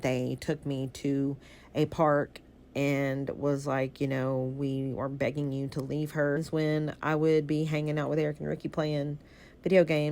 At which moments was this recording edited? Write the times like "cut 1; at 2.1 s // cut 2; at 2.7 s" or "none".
cut 1; at 6.4 s